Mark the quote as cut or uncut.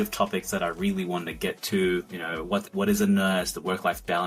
uncut